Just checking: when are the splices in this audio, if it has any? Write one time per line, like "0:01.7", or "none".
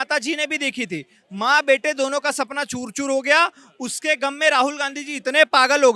none